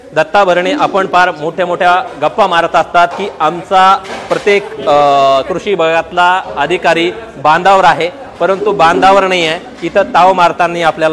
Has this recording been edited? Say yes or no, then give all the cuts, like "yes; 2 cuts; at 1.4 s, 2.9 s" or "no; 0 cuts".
no; 0 cuts